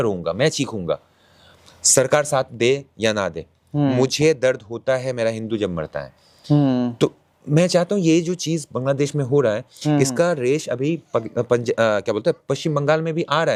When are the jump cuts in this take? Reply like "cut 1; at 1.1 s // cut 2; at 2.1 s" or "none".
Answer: none

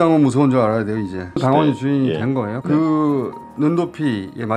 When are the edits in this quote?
cut 1; at 1.4 s // cut 2; at 2.6 s

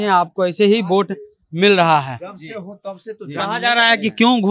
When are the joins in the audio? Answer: none

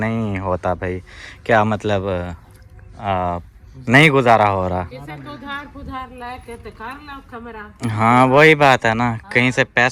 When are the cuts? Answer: none

